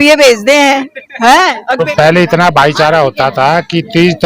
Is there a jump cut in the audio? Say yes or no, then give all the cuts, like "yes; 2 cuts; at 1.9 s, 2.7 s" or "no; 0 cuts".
yes; 1 cut; at 1.8 s